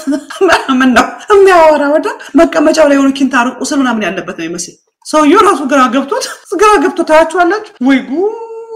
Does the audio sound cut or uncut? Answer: uncut